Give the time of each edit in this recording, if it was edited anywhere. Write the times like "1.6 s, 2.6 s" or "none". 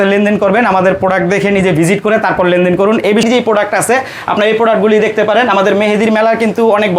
3.2 s